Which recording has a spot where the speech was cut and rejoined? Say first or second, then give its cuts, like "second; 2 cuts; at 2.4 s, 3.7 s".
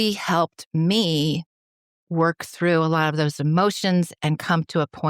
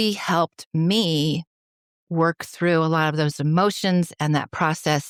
first; 1 cut; at 4.1 s